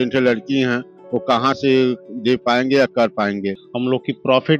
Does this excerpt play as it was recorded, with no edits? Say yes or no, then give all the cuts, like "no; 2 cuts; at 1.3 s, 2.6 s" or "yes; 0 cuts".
no; 1 cut; at 3.6 s